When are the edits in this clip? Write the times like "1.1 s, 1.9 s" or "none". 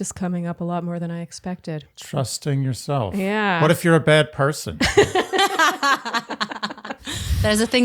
1.9 s, 7.0 s